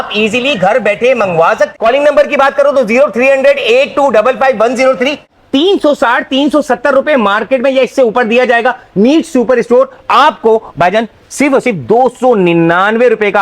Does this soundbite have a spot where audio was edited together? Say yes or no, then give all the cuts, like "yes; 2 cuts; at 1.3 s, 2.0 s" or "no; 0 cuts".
yes; 2 cuts; at 1.7 s, 5.3 s